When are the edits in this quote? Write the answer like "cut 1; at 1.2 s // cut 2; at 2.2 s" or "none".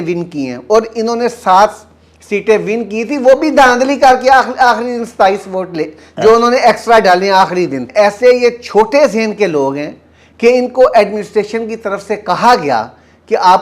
cut 1; at 7.9 s